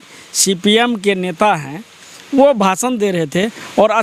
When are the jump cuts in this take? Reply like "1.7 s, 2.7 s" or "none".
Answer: none